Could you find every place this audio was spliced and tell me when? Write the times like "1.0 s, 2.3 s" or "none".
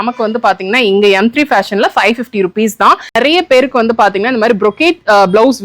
3.1 s